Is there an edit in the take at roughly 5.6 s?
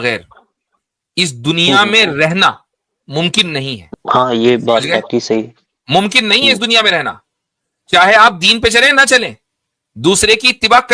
no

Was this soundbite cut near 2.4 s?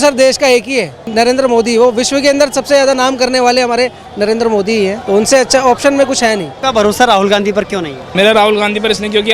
no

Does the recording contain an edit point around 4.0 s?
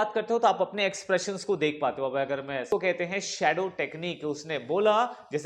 no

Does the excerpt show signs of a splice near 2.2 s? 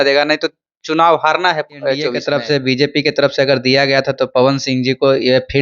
yes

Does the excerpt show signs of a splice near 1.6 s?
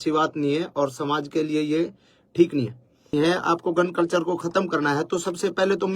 no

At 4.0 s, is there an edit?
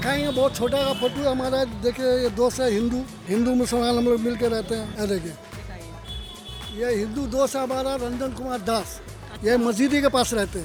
no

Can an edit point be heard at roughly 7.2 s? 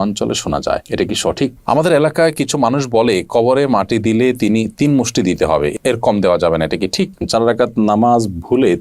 yes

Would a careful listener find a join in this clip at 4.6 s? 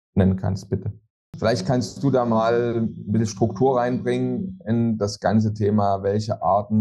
no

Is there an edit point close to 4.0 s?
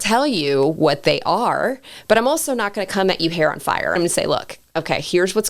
yes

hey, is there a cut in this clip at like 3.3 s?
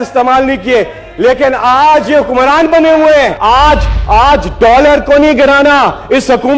yes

